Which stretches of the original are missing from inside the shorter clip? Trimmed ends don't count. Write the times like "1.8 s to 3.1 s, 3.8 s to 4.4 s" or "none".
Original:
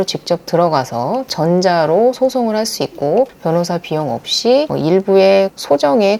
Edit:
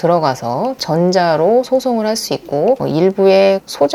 3.3 s to 4.7 s